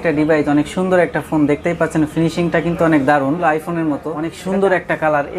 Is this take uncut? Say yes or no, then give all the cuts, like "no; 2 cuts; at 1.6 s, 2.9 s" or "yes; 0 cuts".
no; 1 cut; at 3.7 s